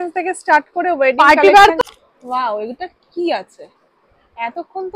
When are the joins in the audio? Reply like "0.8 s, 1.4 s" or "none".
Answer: 1.8 s